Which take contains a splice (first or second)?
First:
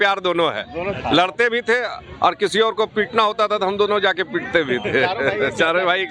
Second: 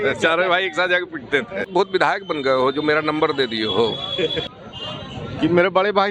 second